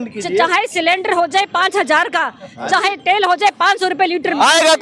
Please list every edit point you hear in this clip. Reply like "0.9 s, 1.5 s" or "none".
none